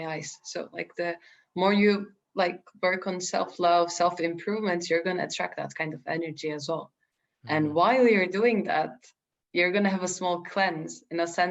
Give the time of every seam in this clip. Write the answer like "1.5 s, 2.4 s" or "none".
none